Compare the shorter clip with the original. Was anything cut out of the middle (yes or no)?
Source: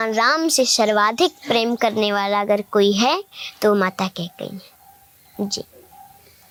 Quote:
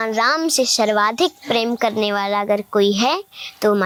no